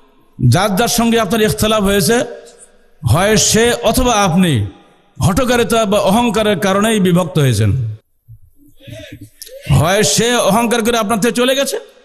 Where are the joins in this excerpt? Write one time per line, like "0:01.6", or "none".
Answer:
none